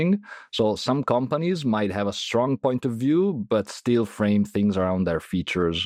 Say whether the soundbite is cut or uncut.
uncut